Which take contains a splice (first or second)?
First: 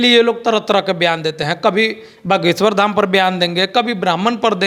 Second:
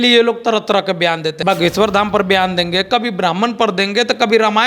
second